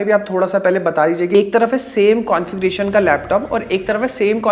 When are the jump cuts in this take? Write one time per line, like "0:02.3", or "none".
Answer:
0:01.3